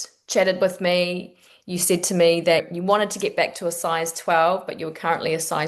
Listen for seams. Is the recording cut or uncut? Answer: cut